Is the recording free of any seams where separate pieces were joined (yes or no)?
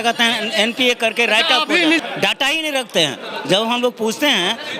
no